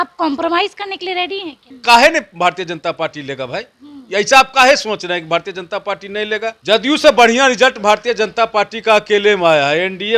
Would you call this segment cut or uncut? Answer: cut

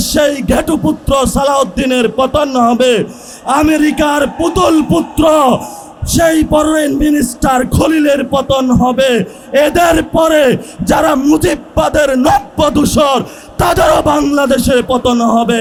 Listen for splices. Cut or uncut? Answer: uncut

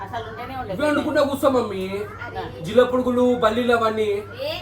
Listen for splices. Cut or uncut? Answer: uncut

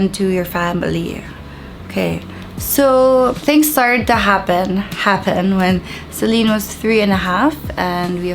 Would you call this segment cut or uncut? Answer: uncut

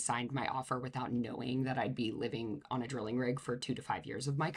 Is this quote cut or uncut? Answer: uncut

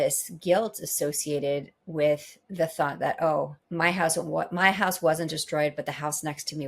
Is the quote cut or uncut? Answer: cut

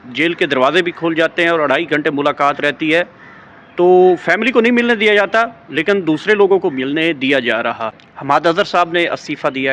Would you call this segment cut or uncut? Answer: cut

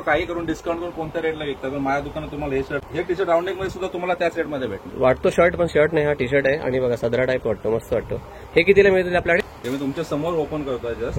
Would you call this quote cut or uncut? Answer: cut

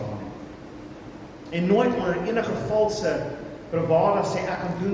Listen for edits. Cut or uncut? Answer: cut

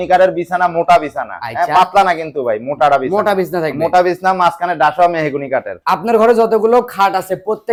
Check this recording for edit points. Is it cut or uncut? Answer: uncut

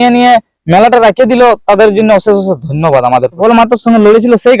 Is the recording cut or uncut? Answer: cut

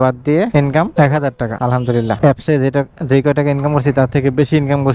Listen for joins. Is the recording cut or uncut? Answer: cut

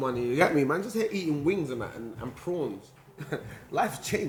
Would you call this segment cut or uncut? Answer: uncut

